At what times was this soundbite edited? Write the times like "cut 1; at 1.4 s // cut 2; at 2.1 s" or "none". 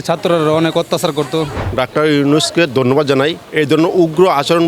cut 1; at 1.6 s // cut 2; at 3.4 s